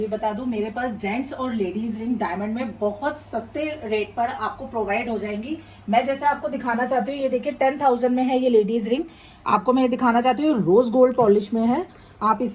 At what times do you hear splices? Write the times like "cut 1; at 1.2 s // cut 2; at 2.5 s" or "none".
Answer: none